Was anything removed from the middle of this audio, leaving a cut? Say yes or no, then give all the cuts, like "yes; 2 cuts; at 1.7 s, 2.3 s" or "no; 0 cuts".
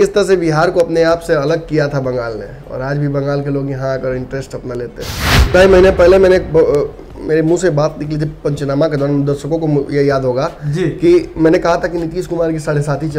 yes; 1 cut; at 5.5 s